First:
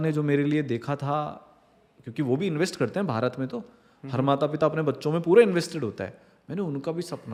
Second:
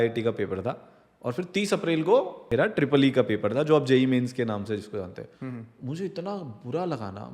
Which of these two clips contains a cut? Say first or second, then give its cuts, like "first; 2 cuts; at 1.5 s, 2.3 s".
second; 1 cut; at 2.4 s